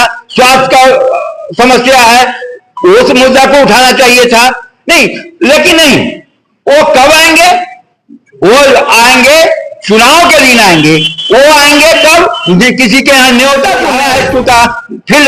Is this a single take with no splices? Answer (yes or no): no